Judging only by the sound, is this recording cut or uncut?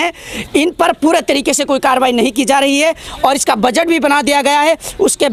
uncut